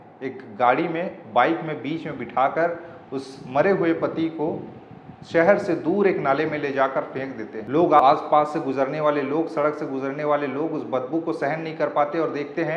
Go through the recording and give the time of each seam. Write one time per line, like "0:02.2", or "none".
0:08.0